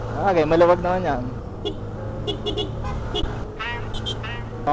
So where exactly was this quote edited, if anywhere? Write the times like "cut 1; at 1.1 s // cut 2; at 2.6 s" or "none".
cut 1; at 1.4 s // cut 2; at 3.5 s